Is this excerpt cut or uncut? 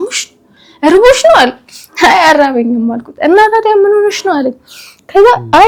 uncut